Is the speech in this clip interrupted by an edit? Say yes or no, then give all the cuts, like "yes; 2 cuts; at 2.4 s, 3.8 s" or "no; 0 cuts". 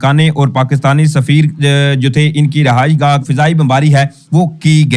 yes; 1 cut; at 3.3 s